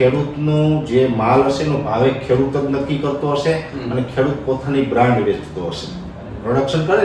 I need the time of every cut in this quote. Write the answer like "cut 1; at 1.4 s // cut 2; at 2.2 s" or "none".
none